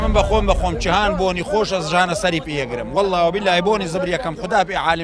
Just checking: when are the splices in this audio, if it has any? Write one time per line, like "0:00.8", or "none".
none